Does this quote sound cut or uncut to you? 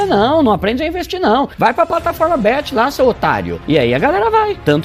cut